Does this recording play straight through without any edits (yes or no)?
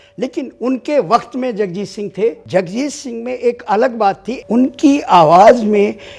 no